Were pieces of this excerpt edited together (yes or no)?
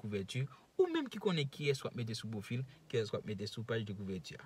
no